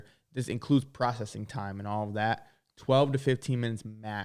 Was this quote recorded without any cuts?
yes; 0 cuts

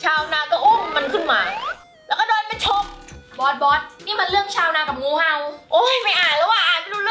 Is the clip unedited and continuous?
yes; 0 cuts

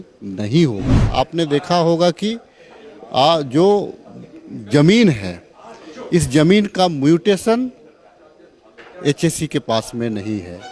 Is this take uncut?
no; 1 cut; at 1.0 s

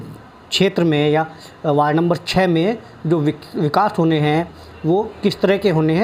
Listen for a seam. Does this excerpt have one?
no; 0 cuts

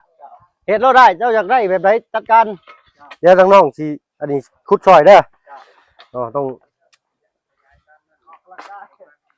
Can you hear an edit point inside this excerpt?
no; 0 cuts

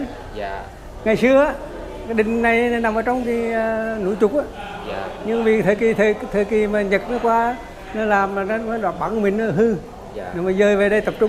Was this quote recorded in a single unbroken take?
yes; 0 cuts

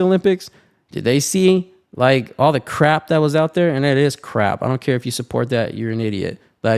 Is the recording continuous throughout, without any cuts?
yes; 0 cuts

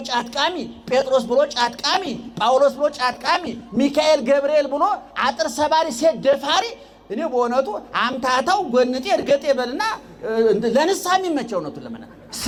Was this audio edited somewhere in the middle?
no; 0 cuts

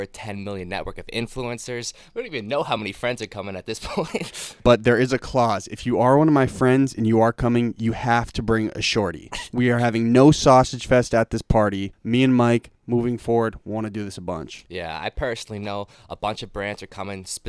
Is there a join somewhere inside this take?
yes; 2 cuts; at 4.4 s, 11.9 s

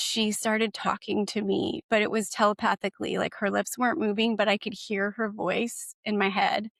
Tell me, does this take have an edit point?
no; 0 cuts

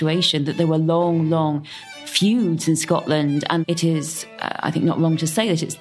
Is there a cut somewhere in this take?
yes; 1 cut; at 3.6 s

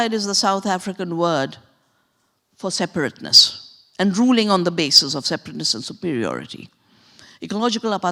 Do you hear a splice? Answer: no; 0 cuts

